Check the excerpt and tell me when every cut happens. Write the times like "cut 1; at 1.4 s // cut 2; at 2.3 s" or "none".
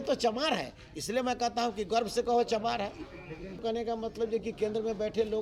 cut 1; at 3.6 s